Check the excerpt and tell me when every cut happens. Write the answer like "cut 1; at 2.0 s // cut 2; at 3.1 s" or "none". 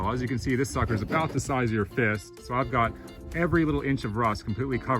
cut 1; at 2.3 s